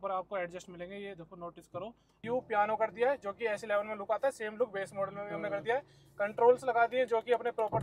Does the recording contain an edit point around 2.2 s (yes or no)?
yes